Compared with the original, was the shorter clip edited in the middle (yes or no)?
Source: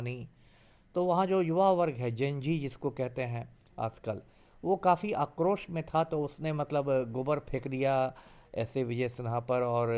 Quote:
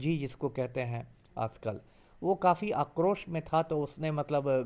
no